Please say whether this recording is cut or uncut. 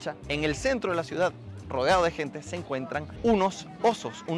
uncut